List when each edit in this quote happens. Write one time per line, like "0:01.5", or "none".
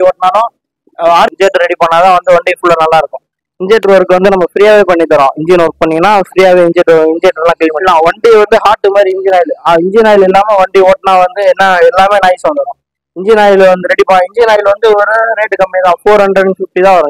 0:01.3
0:07.8